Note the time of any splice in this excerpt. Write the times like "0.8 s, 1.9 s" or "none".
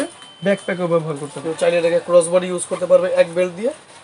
1.3 s